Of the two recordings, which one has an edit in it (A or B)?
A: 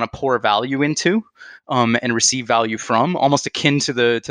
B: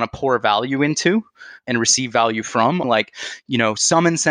B